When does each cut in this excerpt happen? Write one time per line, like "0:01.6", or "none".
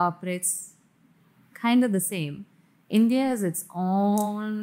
none